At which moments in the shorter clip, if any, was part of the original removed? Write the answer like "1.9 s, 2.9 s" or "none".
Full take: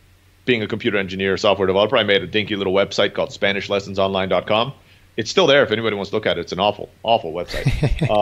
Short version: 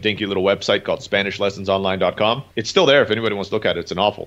2.5 s